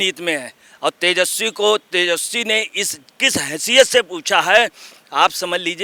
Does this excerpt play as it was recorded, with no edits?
yes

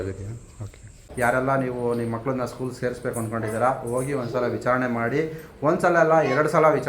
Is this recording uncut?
no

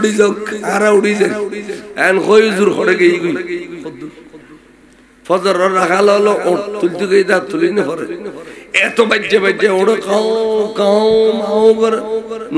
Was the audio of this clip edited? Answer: no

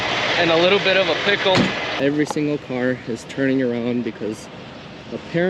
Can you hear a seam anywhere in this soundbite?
yes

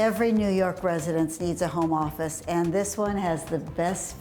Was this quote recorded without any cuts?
yes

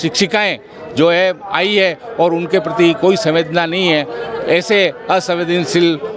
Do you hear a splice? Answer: no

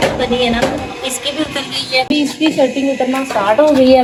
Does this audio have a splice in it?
no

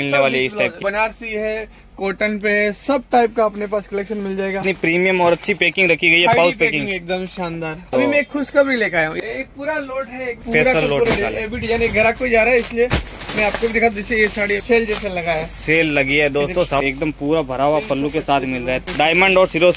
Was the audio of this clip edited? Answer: yes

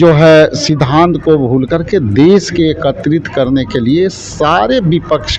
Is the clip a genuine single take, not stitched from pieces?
yes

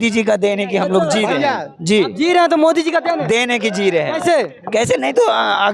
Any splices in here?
no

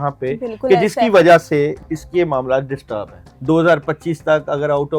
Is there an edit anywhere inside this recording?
yes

